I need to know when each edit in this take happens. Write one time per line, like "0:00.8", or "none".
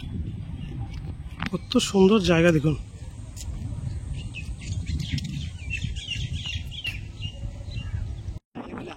none